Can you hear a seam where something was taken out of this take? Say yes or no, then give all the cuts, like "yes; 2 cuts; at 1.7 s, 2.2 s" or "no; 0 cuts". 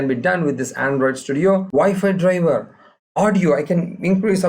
yes; 1 cut; at 1.7 s